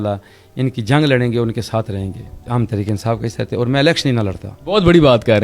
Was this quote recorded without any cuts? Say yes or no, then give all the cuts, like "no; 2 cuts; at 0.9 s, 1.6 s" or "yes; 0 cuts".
no; 2 cuts; at 2.4 s, 4.5 s